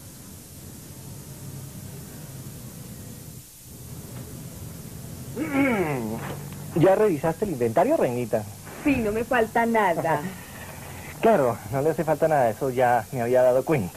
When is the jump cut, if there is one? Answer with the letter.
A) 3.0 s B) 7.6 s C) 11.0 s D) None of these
C